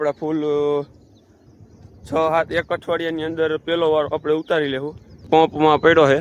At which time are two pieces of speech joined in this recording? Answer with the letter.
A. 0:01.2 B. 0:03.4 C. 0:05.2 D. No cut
C